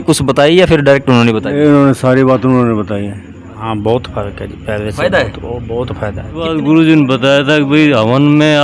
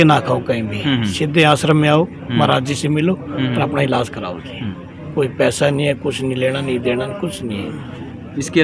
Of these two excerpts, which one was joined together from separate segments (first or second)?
first